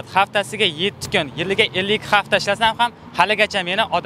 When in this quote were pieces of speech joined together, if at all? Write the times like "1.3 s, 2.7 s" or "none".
none